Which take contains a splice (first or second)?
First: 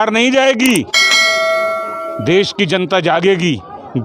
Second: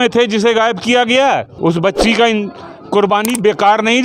second